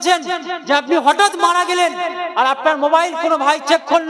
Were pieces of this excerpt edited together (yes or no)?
no